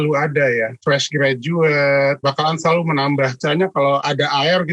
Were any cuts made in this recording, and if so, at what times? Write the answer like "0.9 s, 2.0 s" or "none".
3.4 s